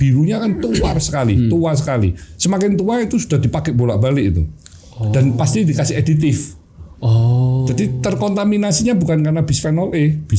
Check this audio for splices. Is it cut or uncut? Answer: uncut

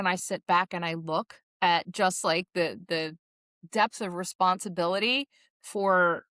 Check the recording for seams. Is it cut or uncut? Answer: uncut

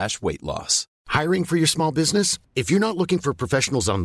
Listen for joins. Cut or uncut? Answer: uncut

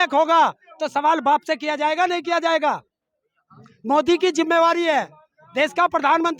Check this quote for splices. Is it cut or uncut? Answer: uncut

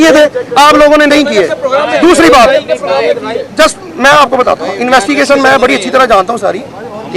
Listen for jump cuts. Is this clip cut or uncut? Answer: uncut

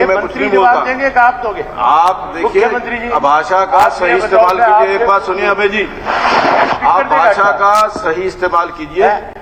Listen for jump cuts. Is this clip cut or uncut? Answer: uncut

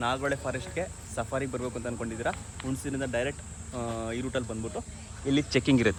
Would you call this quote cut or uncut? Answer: uncut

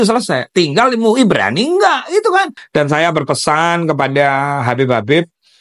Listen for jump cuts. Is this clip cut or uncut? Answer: cut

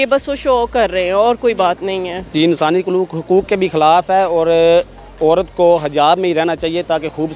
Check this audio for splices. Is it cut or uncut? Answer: uncut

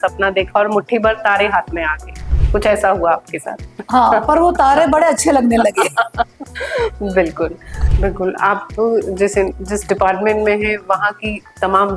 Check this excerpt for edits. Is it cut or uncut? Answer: cut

